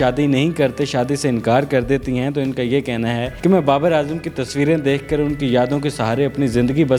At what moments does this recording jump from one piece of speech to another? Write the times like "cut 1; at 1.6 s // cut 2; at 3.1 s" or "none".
none

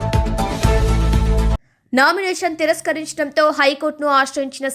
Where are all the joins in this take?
cut 1; at 1.5 s

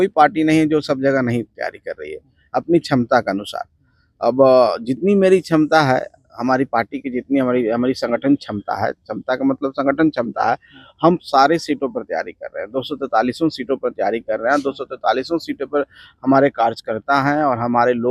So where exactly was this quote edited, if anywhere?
none

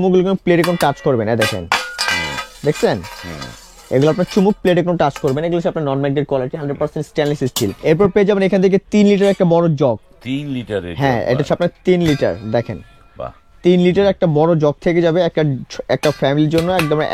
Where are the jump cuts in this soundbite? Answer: cut 1; at 7.8 s

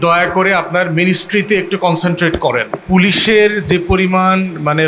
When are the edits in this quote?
cut 1; at 2.8 s

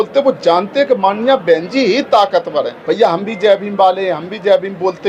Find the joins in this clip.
cut 1; at 2.8 s

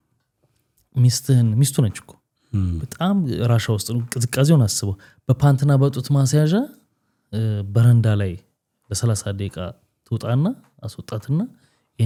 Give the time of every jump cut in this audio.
none

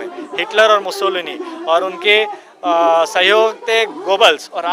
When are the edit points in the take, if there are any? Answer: none

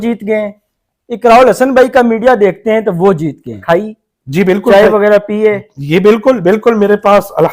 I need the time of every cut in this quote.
cut 1; at 3.5 s

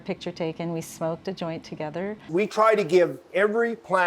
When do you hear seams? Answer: cut 1; at 2.3 s

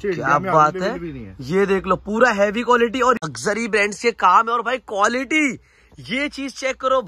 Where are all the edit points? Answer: cut 1; at 3.3 s

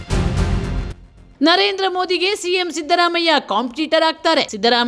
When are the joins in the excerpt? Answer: none

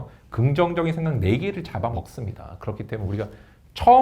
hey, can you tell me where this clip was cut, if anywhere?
cut 1; at 1.9 s

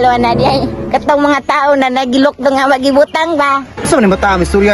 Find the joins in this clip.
cut 1; at 3.7 s

